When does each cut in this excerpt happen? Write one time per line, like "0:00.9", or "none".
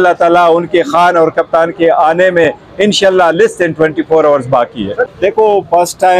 0:05.0

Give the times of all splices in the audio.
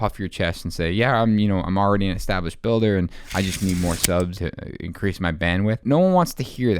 0:04.4
0:05.8

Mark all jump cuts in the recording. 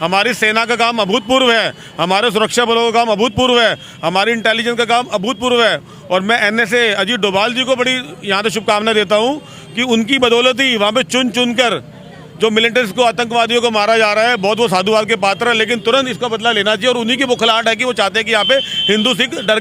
none

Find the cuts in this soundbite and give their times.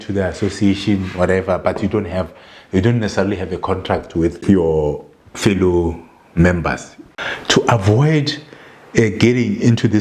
0:04.4
0:07.0

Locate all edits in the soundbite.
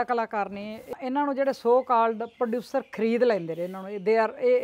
0:00.9

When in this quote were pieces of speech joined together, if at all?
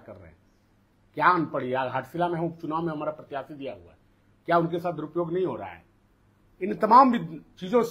none

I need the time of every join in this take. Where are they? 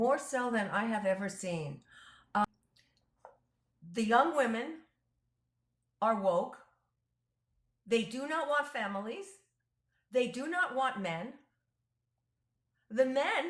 0:02.4

